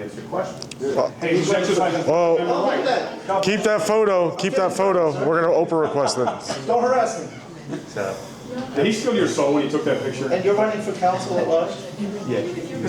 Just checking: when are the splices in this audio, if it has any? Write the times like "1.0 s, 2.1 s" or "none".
none